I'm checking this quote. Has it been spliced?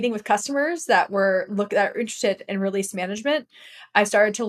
no; 0 cuts

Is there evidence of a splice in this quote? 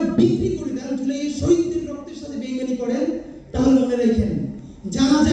no; 0 cuts

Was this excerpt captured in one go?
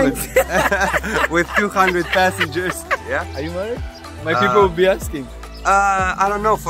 no; 1 cut; at 3.0 s

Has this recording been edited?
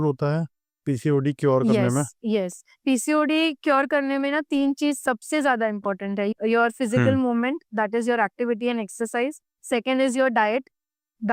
no; 0 cuts

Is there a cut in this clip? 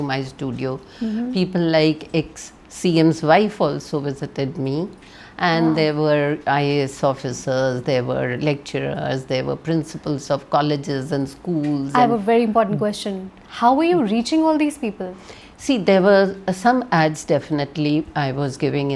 no; 0 cuts

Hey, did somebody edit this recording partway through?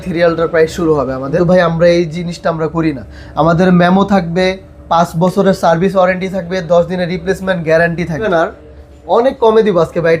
yes; 2 cuts; at 1.3 s, 8.3 s

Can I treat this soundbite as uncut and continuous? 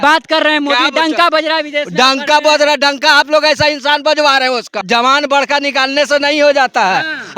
no; 1 cut; at 4.8 s

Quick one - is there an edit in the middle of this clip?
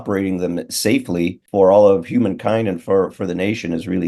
yes; 1 cut; at 1.4 s

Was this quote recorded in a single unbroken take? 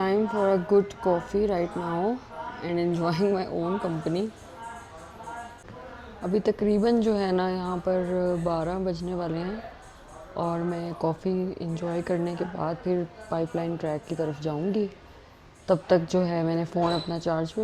yes; 0 cuts

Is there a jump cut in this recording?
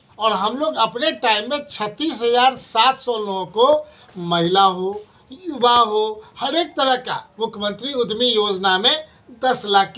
no; 0 cuts

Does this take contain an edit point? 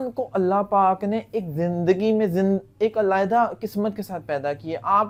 no; 0 cuts

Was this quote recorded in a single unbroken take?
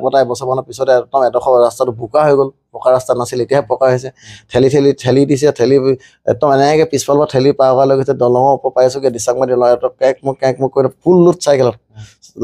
yes; 0 cuts

